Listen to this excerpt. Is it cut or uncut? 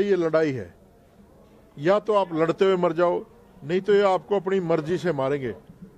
uncut